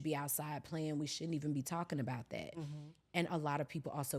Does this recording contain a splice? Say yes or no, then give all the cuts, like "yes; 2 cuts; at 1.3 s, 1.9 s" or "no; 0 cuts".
no; 0 cuts